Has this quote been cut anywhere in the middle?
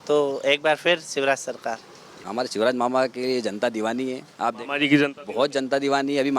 yes; 1 cut; at 2.2 s

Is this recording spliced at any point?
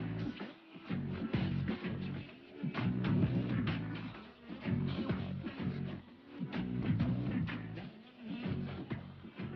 no; 0 cuts

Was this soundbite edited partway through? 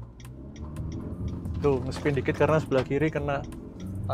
no; 0 cuts

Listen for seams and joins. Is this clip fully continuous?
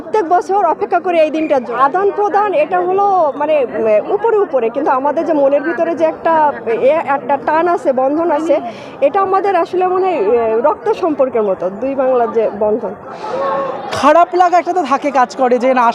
no; 2 cuts; at 1.7 s, 13.2 s

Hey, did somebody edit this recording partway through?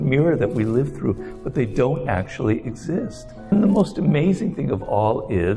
yes; 1 cut; at 3.5 s

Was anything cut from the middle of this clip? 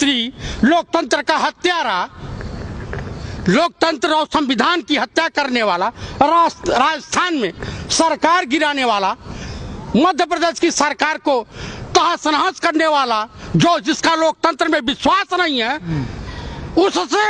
no; 0 cuts

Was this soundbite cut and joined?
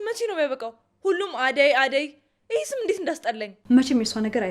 yes; 1 cut; at 3.5 s

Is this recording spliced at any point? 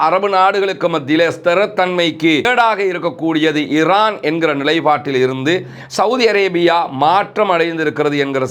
yes; 1 cut; at 2.5 s

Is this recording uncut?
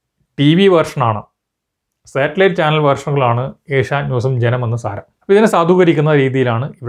yes; 0 cuts

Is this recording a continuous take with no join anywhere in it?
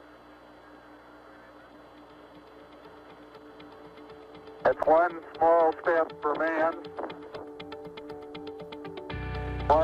yes; 0 cuts

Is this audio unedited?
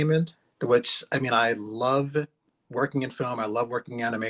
yes; 0 cuts

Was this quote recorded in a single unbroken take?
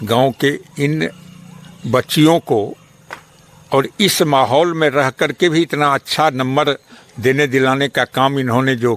yes; 0 cuts

